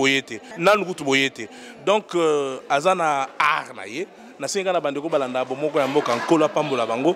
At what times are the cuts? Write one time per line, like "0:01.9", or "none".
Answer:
0:01.1